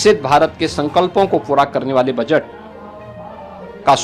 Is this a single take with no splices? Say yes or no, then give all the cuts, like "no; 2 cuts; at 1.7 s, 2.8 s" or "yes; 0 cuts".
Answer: yes; 0 cuts